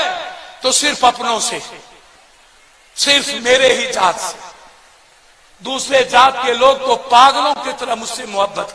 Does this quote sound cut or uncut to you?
uncut